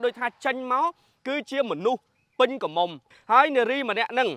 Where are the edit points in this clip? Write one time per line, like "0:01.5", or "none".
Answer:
0:03.1